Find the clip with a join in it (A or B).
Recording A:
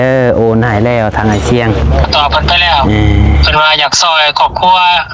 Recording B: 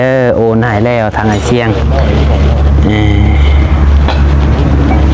A